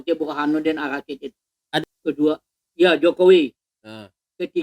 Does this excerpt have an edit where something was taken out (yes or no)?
yes